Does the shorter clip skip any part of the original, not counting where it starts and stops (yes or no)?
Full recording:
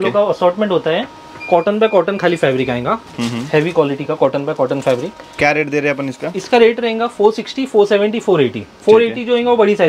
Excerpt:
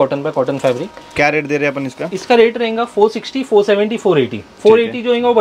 no